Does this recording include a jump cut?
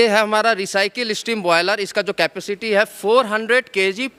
no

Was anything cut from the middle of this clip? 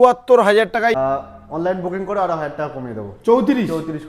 yes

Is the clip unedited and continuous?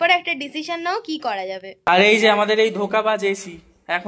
no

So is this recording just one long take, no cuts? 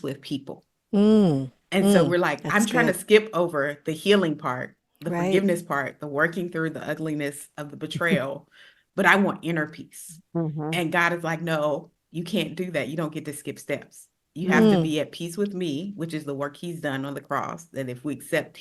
yes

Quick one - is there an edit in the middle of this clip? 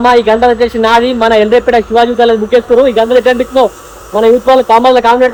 no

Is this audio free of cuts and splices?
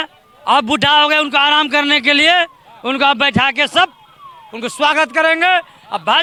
yes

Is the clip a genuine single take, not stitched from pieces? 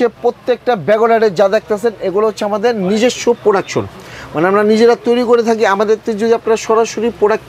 yes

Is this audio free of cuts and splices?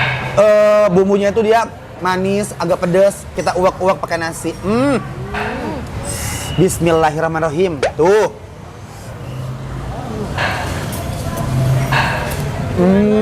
no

